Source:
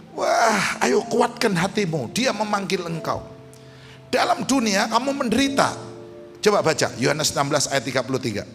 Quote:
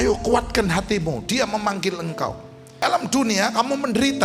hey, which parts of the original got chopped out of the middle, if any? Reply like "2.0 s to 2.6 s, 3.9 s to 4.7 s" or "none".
3.7 s to 4.2 s